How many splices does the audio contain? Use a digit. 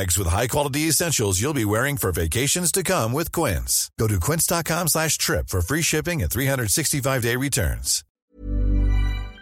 1